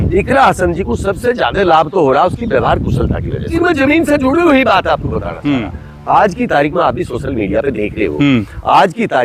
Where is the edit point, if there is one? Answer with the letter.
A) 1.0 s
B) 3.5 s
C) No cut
B